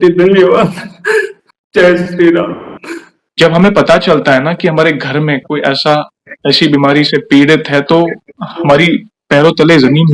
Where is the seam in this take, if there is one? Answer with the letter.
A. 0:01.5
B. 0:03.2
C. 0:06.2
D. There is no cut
B